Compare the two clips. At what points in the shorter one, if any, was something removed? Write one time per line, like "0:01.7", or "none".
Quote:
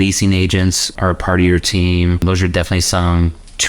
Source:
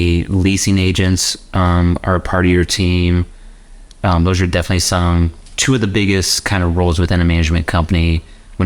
0:01.0
0:02.2